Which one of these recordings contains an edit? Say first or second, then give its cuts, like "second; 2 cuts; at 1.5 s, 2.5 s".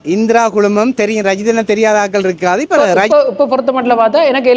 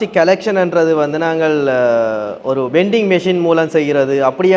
first; 1 cut; at 2.9 s